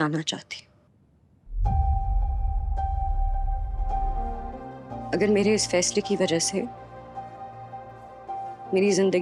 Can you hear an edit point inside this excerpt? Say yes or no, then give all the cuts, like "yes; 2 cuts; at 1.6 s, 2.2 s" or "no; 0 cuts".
yes; 1 cut; at 4.3 s